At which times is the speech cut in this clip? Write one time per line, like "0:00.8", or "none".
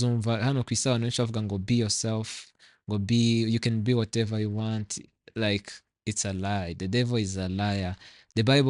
none